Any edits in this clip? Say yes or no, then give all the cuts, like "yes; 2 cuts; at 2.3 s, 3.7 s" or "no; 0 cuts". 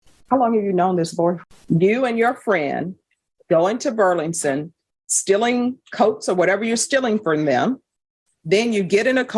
yes; 1 cut; at 1.5 s